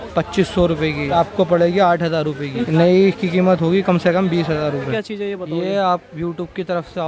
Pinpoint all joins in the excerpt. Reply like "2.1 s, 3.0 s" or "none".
1.1 s, 2.6 s, 4.9 s